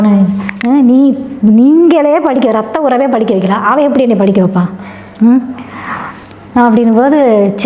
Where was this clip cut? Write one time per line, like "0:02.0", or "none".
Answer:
none